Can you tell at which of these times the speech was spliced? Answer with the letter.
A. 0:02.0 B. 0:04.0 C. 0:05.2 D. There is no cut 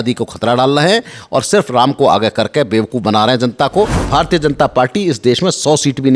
B